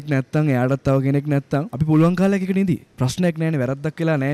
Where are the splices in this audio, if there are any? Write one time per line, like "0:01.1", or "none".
0:01.7

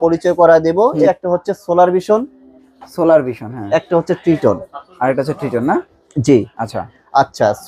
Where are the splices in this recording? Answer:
0:01.1

